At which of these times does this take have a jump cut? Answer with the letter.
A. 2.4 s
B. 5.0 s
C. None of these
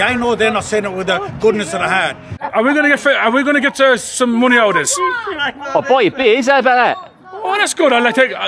A